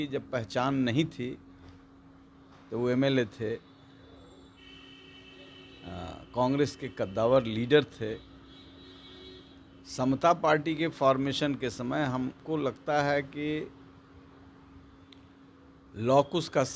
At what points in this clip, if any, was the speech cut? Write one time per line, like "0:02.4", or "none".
none